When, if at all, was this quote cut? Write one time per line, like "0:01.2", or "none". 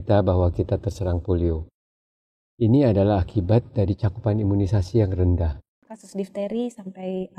0:06.0